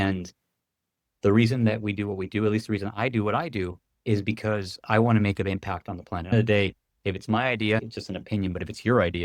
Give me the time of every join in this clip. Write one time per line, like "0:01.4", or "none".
0:06.3
0:07.8